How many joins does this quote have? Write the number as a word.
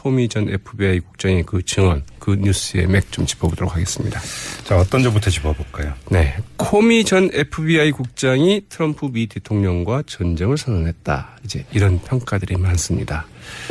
one